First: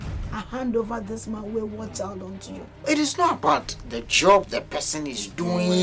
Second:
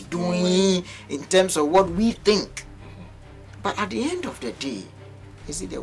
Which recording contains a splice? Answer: first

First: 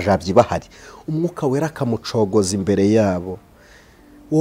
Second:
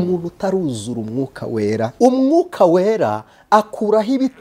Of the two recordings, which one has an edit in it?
second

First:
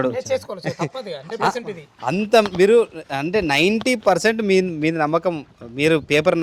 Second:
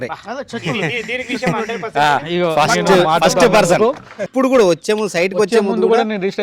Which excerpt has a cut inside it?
second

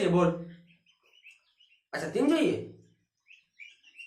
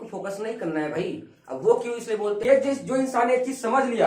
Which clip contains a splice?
second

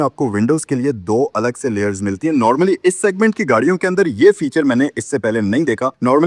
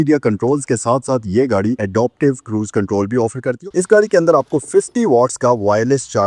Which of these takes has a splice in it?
second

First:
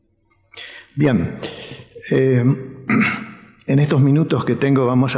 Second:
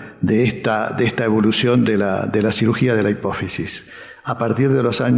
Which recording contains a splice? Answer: second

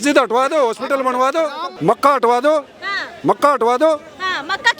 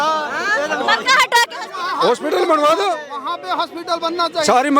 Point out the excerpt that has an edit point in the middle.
first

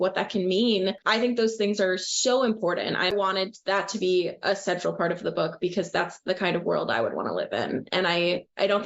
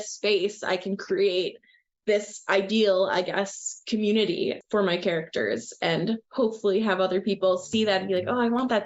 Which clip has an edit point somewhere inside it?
first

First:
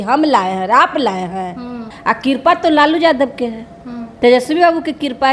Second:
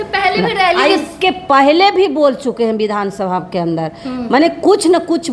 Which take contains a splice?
first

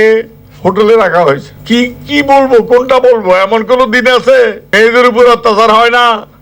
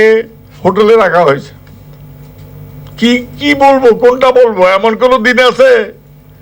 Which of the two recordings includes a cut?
first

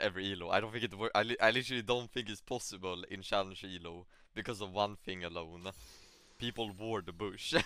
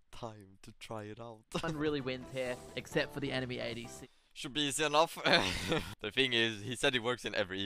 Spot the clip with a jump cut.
second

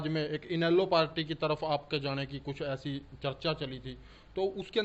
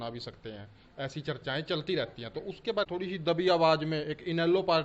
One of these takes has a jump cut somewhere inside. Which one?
second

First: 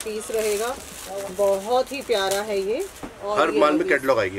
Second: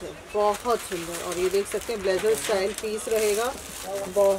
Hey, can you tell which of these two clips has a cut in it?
first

